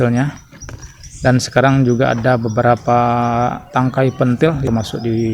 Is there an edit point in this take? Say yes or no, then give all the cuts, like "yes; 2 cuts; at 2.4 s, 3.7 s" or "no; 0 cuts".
no; 0 cuts